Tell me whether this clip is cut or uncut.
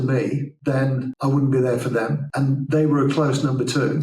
cut